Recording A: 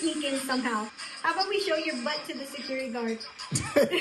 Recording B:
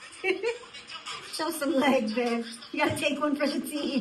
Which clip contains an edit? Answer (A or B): A